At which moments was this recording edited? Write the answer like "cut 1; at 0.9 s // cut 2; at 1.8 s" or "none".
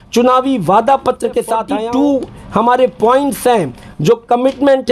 cut 1; at 1.7 s